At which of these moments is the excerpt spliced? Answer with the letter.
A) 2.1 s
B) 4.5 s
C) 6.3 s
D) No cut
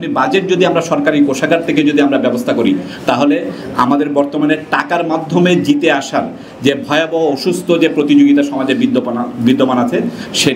D